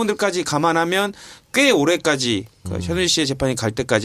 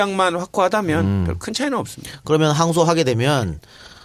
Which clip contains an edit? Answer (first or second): first